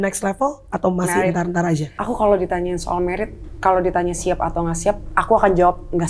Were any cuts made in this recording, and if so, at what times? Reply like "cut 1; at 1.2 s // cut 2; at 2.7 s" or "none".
cut 1; at 1.9 s